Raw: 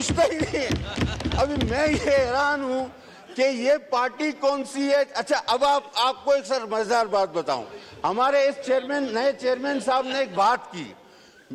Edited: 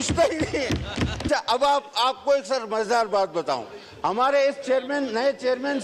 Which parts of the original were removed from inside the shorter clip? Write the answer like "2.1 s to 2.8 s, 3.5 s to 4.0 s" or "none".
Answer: 1.2 s to 5.2 s